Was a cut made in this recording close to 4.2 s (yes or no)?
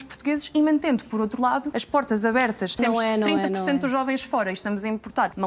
no